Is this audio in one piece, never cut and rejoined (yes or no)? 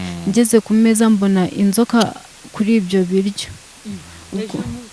yes